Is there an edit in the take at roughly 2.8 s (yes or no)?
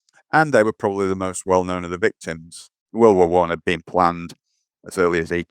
yes